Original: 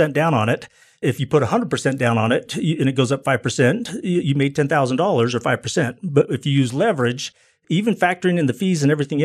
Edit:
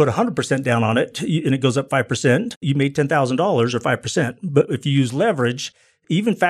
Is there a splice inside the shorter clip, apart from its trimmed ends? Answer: yes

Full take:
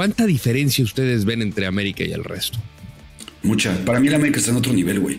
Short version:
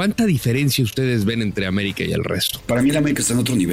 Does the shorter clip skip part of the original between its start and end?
yes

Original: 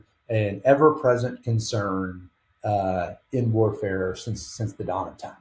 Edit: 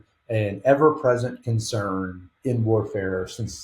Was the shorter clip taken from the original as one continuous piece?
no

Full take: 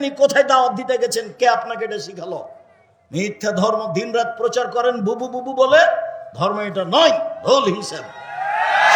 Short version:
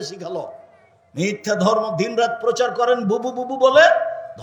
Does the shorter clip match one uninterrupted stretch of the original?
yes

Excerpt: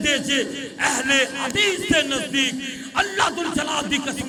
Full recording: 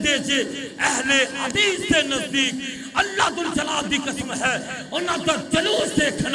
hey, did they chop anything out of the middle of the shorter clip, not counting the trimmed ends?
no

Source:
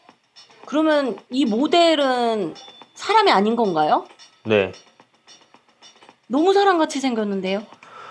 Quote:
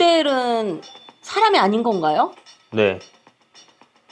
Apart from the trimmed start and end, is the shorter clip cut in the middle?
no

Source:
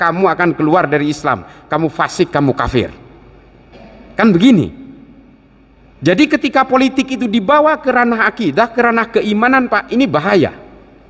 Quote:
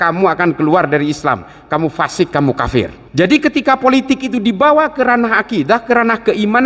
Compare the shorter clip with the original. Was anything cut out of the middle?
yes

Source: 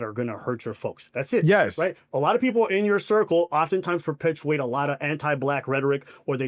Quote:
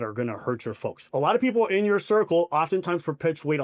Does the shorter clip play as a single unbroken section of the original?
no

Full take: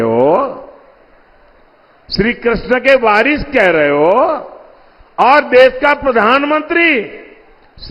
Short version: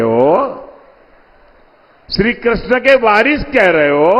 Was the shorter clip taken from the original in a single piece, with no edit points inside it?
yes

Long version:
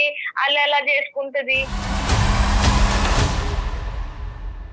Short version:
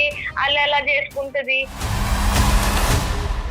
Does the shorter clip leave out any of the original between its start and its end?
yes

